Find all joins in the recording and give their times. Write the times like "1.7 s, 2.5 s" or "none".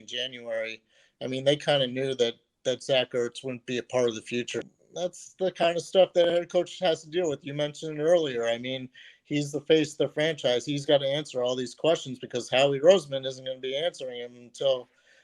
4.6 s